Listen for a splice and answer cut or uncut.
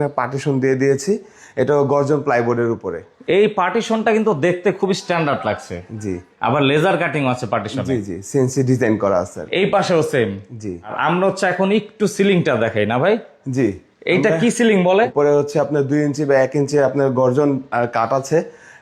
uncut